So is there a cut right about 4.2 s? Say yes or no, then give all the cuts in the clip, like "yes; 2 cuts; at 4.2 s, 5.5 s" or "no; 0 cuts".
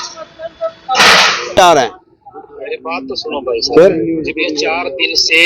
no; 1 cut; at 1.6 s